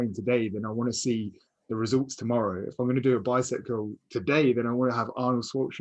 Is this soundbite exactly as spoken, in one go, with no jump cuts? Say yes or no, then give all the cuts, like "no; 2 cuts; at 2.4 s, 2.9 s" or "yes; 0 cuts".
yes; 0 cuts